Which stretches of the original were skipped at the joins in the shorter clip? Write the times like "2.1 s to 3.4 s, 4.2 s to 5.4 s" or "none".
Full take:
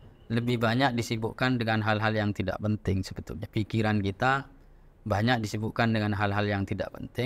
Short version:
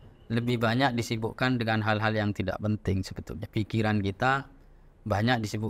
none